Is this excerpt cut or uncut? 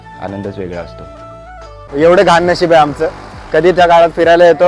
cut